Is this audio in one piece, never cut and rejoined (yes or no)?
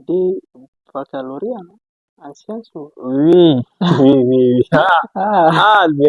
yes